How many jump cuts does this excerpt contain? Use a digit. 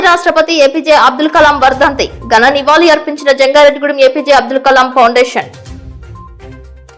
0